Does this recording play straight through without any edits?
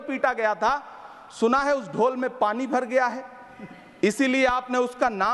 yes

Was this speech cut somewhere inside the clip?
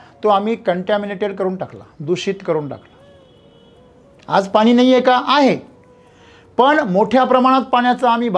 no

